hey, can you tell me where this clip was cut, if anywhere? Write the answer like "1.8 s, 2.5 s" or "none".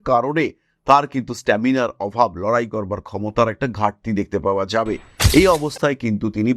5.1 s